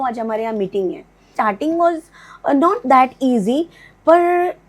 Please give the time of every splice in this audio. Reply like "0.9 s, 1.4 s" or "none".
1.3 s